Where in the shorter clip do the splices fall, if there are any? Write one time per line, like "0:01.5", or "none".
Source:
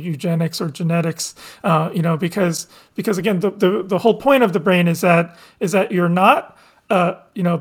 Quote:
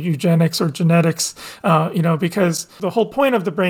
0:02.8